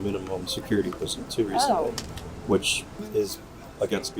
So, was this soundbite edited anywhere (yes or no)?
no